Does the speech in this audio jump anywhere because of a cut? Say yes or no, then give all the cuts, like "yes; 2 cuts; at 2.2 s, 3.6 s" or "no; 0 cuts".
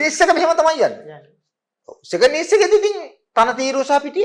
no; 0 cuts